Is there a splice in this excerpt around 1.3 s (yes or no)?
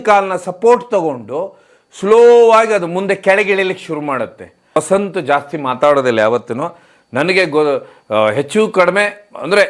no